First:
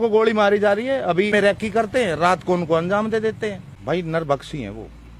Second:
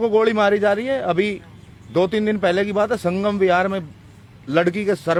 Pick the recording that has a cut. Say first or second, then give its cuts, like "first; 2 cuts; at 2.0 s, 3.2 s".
first; 2 cuts; at 1.3 s, 3.7 s